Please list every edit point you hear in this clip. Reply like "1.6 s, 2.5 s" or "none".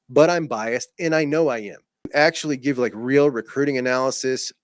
2.0 s